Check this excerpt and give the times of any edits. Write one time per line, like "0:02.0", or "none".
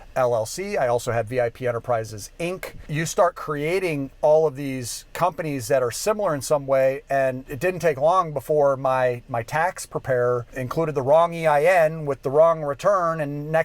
0:02.8
0:07.5
0:10.6